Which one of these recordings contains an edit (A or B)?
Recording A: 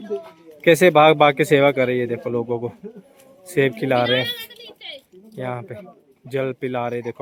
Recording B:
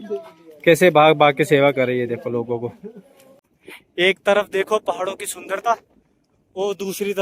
B